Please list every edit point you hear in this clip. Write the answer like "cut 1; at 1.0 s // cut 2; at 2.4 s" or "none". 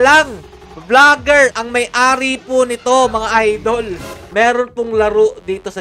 cut 1; at 4.2 s